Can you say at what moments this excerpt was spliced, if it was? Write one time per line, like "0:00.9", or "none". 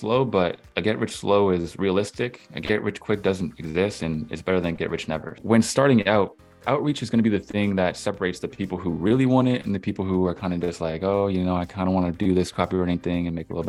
0:05.3